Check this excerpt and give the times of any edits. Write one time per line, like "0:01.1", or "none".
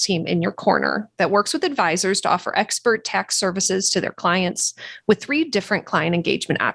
none